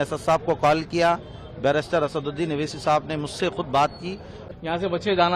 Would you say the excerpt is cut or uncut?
cut